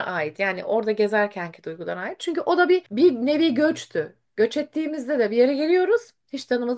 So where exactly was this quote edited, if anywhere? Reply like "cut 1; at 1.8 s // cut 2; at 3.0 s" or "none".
none